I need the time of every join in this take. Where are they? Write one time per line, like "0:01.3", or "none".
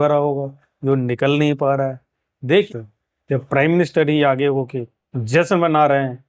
0:02.7